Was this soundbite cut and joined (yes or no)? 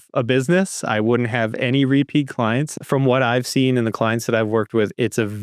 yes